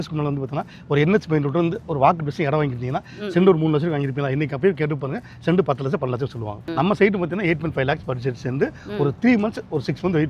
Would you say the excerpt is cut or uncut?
cut